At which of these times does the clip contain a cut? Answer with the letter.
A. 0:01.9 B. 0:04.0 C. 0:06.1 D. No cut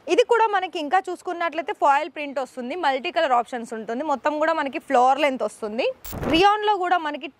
C